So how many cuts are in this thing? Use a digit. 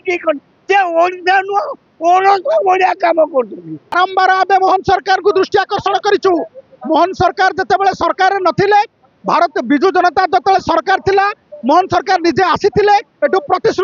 1